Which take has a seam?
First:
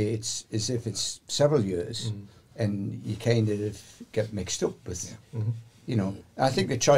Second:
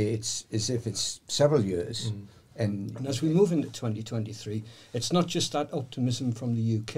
second; 1 cut; at 2.9 s

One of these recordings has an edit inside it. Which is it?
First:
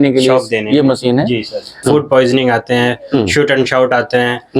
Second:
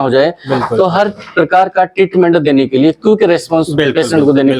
first; 1 cut; at 1.7 s

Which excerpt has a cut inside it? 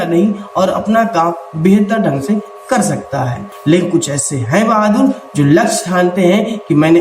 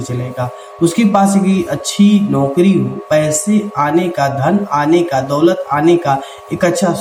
first; 1 cut; at 3.5 s

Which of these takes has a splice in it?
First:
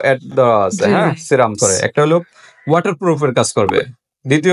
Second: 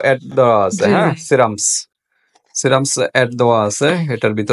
first; 1 cut; at 1.5 s

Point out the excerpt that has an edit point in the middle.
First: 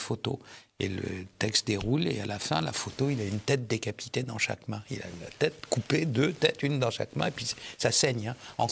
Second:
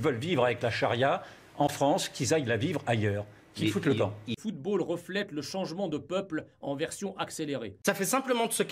second; 2 cuts; at 4.4 s, 7.7 s

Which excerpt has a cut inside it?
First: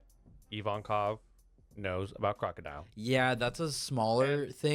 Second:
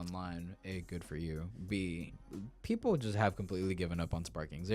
second; 1 cut; at 2.2 s

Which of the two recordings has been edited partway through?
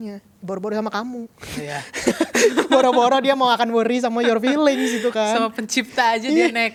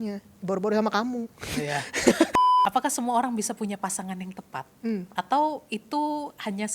second; 2 cuts; at 2.3 s, 5.1 s

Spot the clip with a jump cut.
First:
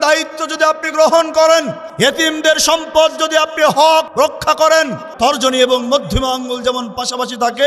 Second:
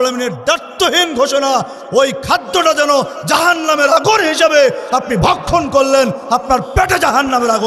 first; 3 cuts; at 1.8 s, 4.1 s, 5.0 s

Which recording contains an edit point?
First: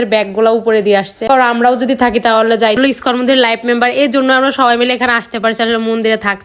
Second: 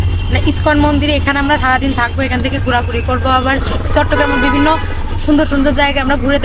first; 1 cut; at 2.8 s

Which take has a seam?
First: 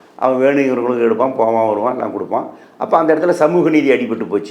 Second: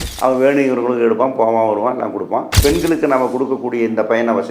second; 1 cut; at 2.5 s

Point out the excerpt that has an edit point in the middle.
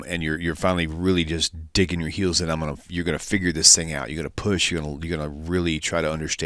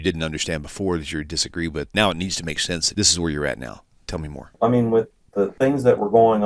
second; 4 cuts; at 1.9 s, 2.9 s, 4.5 s, 5.5 s

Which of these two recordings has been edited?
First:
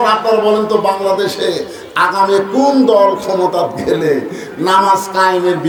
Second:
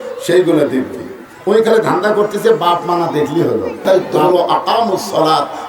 second; 1 cut; at 3.8 s

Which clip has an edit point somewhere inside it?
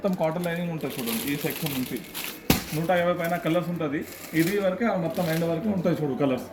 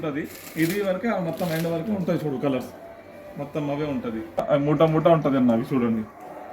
second; 1 cut; at 4.4 s

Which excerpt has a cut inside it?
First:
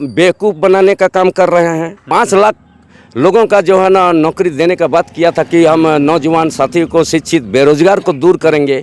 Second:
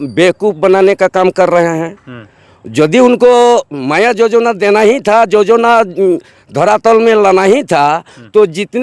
first; 1 cut; at 1.9 s

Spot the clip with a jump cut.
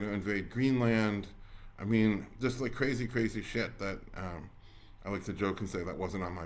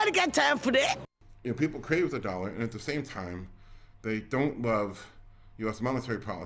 second; 1 cut; at 1.2 s

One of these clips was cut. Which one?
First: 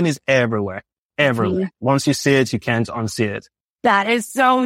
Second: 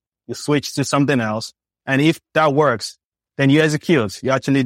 second; 2 cuts; at 2.2 s, 3.2 s

